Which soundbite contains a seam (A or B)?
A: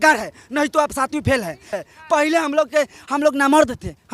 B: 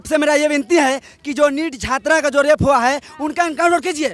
A